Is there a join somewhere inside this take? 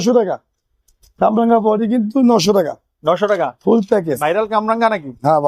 no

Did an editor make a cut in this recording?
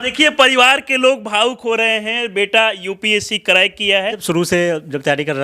yes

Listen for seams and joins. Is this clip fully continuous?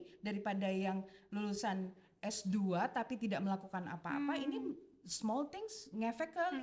yes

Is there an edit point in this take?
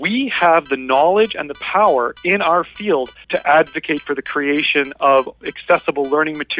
yes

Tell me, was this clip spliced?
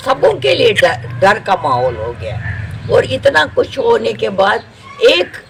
no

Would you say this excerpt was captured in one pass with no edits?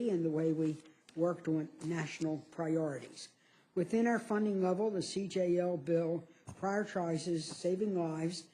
no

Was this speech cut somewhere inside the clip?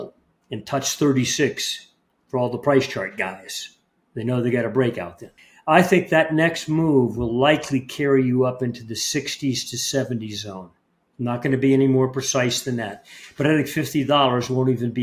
no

